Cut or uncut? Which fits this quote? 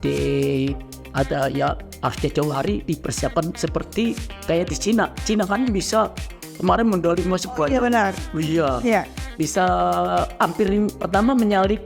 uncut